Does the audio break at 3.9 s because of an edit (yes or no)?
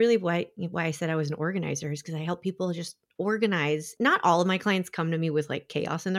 yes